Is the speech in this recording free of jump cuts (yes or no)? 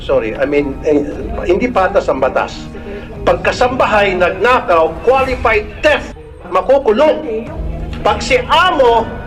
yes